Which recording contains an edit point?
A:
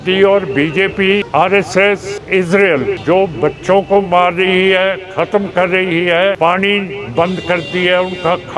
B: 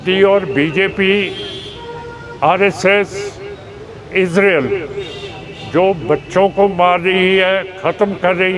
A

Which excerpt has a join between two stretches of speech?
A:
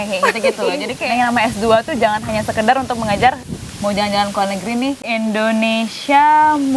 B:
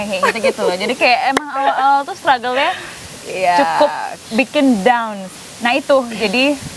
A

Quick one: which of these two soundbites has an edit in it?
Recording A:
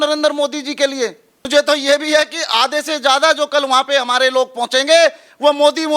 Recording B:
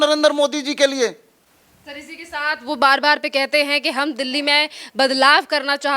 A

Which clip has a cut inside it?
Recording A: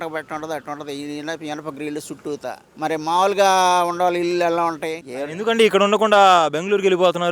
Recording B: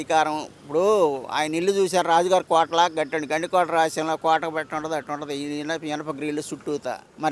A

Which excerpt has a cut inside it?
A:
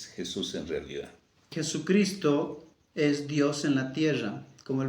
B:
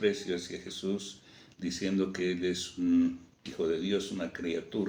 A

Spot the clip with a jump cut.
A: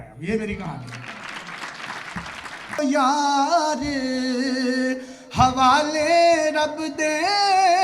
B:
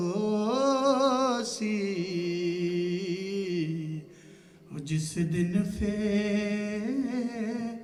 A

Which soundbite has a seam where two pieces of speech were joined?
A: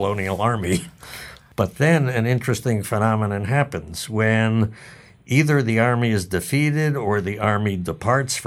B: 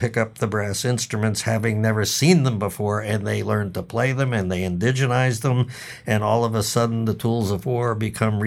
A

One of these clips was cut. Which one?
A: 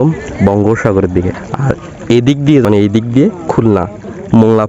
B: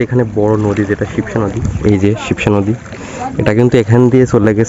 A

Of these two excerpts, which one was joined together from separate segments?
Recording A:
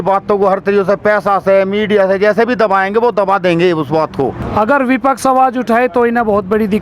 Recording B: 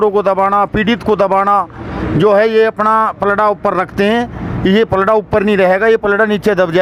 A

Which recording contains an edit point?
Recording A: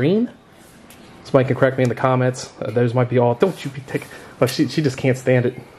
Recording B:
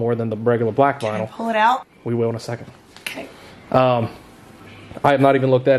B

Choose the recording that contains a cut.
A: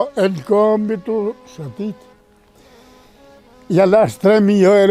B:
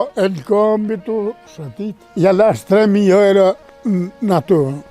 B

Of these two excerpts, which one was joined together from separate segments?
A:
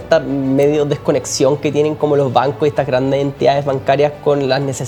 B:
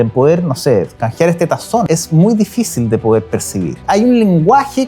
B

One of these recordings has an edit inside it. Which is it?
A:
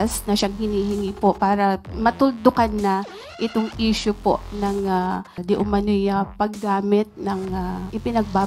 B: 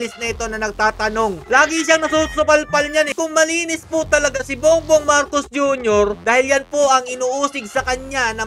B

